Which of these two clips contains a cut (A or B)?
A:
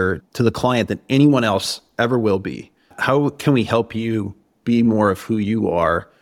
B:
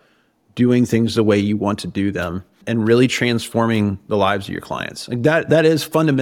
B